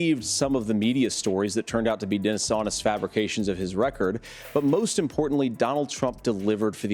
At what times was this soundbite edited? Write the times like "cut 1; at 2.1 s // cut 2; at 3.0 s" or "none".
none